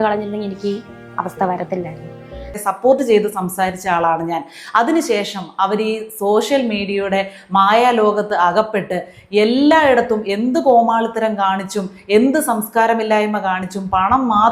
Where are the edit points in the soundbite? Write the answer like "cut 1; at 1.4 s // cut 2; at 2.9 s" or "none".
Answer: cut 1; at 2.6 s